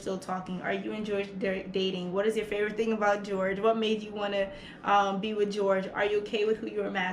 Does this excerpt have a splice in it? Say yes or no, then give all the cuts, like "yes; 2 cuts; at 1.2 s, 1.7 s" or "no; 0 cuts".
no; 0 cuts